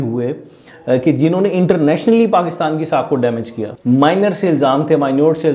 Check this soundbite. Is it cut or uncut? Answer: cut